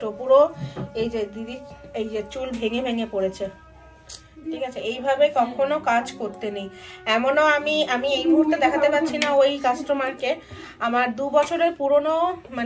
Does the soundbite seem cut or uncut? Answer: uncut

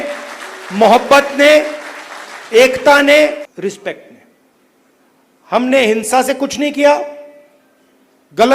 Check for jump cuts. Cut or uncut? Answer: cut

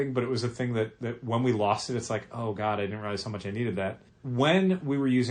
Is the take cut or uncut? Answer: cut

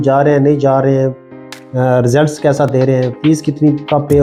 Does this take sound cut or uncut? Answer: uncut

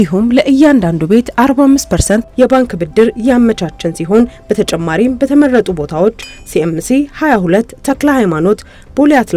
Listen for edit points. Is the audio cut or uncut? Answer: uncut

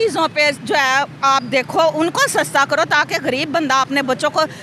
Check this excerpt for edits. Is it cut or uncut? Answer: uncut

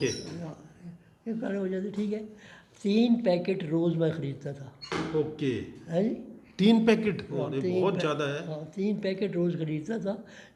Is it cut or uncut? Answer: uncut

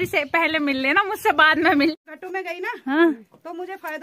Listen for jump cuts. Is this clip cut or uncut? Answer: cut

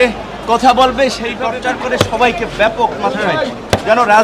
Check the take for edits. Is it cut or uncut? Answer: cut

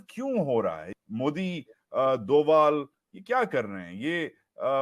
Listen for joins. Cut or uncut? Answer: cut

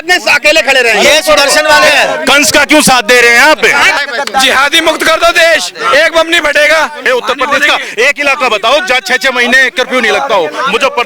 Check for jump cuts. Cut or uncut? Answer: cut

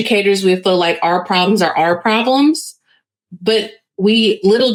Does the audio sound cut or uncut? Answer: uncut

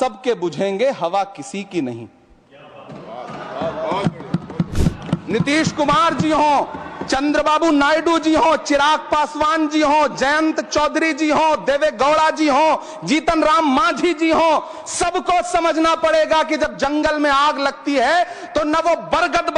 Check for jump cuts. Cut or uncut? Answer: uncut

